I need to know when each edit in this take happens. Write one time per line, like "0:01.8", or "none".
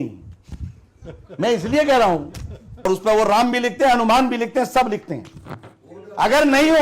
0:02.9